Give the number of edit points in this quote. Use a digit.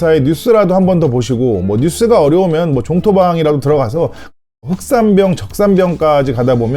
1